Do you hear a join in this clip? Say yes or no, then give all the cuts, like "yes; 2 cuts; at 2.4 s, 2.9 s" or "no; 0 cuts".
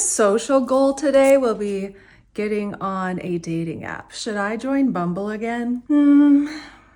no; 0 cuts